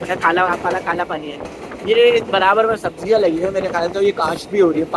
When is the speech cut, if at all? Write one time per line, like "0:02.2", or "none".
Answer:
none